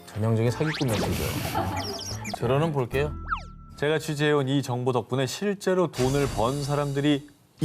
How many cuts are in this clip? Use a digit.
1